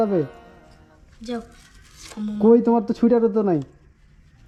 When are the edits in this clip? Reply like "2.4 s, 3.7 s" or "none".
none